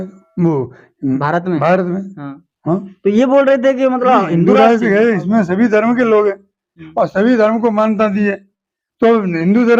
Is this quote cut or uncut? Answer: cut